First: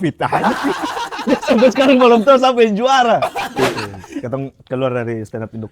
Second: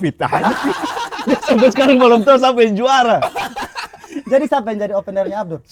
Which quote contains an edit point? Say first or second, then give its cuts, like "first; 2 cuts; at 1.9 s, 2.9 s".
first; 1 cut; at 3.6 s